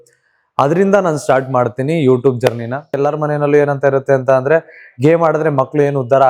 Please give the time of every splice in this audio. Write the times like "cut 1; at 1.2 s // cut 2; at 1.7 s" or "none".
cut 1; at 3.0 s